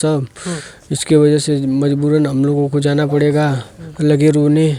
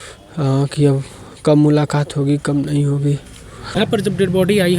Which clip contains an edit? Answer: second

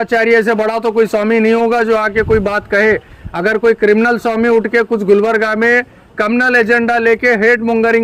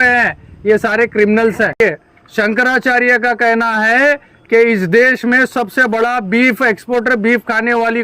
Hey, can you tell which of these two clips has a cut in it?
second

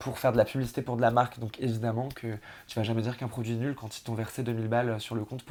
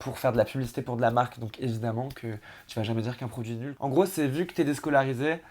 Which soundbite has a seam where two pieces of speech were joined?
second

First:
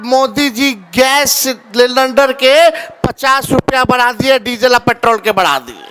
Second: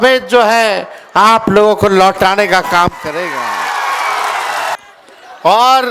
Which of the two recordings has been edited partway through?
second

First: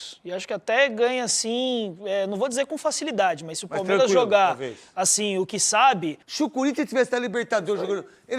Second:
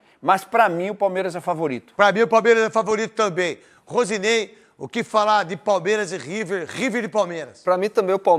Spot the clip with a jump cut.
first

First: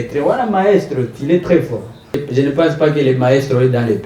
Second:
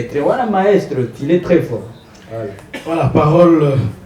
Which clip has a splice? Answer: first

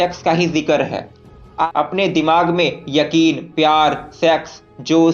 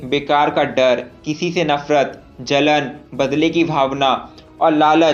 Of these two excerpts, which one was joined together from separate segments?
first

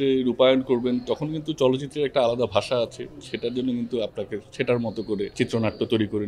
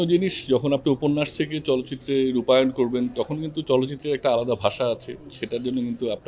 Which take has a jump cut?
first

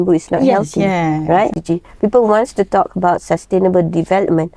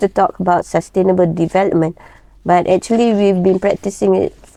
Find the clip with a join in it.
first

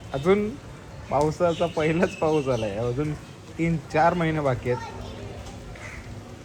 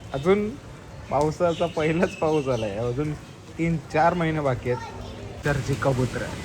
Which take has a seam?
second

